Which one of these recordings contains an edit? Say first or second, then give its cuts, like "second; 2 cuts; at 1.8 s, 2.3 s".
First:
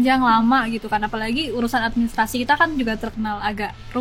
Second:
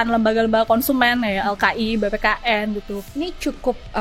second; 1 cut; at 3.0 s